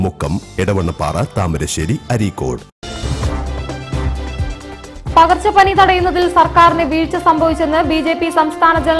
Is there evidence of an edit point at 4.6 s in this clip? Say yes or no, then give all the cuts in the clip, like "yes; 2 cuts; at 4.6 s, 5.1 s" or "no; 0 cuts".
yes; 2 cuts; at 2.8 s, 4.6 s